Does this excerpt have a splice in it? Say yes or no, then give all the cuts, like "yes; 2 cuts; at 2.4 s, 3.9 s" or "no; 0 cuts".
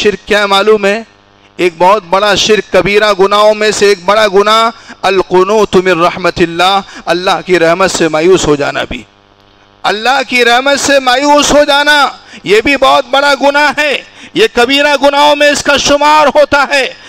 no; 0 cuts